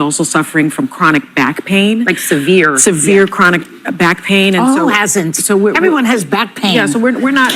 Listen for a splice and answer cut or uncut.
uncut